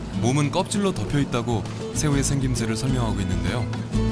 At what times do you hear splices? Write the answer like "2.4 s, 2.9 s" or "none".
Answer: 1.1 s